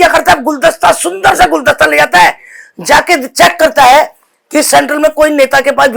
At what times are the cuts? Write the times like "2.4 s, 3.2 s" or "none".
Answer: none